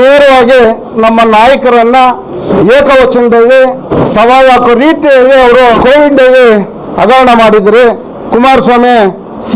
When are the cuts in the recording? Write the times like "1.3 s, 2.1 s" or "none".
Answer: 2.5 s, 3.9 s, 5.8 s